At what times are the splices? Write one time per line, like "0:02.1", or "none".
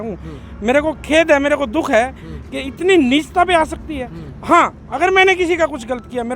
none